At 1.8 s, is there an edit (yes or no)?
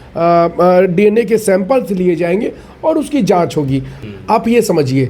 no